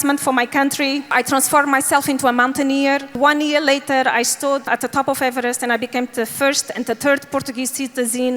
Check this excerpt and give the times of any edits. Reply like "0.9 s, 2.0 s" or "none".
1.1 s, 3.1 s, 4.6 s